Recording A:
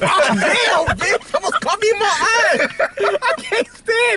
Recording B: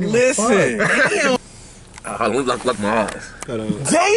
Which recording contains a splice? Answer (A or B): B